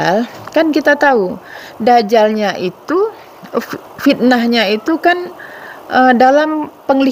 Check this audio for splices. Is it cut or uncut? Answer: uncut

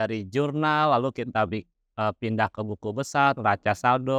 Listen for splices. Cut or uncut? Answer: uncut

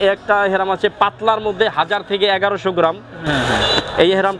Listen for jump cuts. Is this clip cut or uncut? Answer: cut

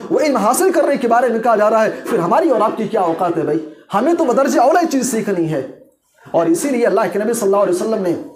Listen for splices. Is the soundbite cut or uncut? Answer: uncut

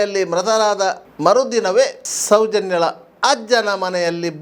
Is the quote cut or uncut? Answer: cut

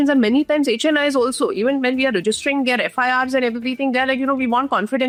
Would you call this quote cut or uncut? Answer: uncut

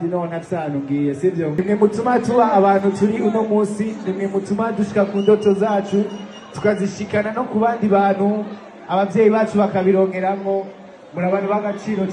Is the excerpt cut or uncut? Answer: cut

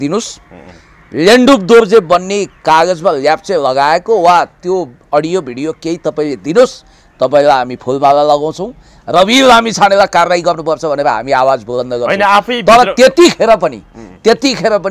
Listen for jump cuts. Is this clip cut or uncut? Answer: uncut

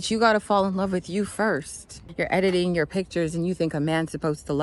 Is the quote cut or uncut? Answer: cut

